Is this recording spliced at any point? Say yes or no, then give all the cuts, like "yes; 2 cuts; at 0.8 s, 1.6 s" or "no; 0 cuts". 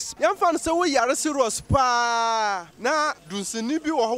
yes; 1 cut; at 3.1 s